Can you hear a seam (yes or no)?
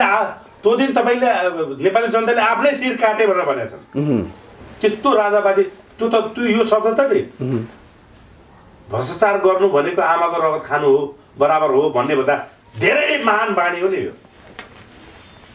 no